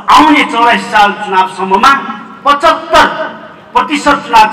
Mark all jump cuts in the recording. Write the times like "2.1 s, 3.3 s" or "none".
none